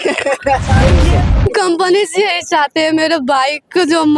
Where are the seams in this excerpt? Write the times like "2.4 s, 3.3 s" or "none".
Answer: 1.0 s